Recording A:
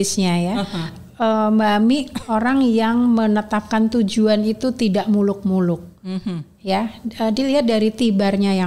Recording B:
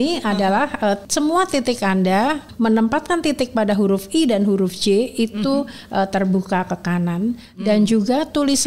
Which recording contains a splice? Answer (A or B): B